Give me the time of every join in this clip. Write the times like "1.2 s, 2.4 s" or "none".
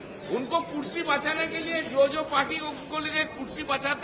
none

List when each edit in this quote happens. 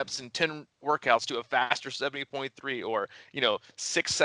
none

